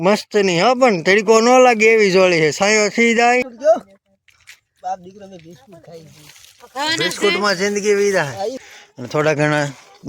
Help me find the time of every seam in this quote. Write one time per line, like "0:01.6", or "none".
0:03.5
0:08.7